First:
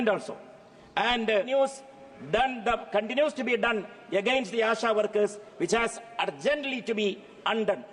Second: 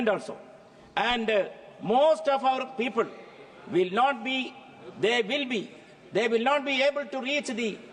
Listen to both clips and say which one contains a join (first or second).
first